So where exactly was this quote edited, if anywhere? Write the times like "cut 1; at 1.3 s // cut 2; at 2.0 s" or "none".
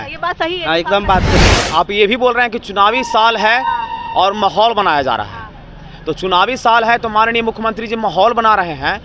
cut 1; at 1.4 s